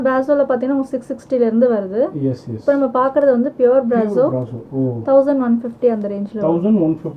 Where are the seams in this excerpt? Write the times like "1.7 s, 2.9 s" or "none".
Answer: none